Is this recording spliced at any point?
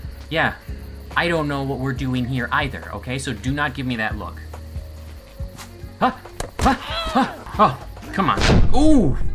yes; 1 cut; at 7.4 s

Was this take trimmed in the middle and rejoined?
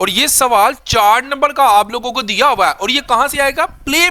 no; 0 cuts

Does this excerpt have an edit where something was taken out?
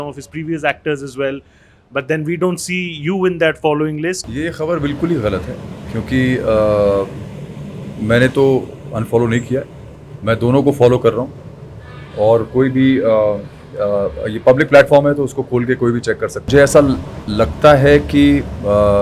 yes; 2 cuts; at 4.3 s, 16.5 s

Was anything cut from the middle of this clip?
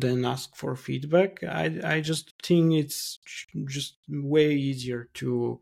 no; 0 cuts

